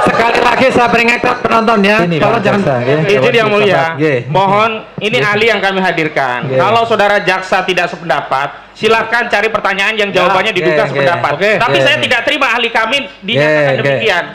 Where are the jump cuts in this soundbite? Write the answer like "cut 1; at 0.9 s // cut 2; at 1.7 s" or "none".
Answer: cut 1; at 2.6 s